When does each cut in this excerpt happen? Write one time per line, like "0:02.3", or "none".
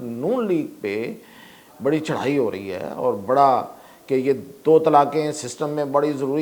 none